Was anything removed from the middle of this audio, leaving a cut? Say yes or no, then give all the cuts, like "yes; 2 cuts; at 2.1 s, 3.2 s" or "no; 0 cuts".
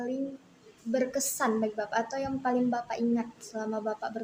no; 0 cuts